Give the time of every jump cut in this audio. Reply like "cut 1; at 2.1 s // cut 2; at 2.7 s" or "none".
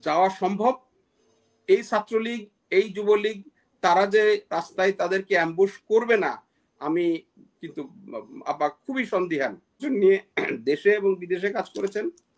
cut 1; at 9.8 s